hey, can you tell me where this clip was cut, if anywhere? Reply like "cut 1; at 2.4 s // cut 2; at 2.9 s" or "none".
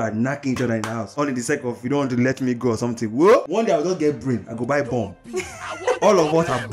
cut 1; at 3.5 s